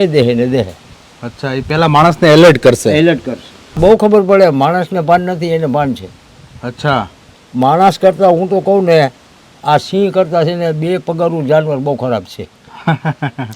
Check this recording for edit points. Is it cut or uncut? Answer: cut